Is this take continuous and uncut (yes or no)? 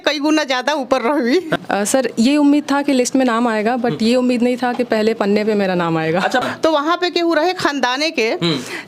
no